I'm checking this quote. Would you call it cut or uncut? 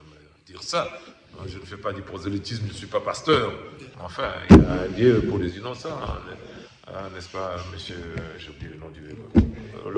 uncut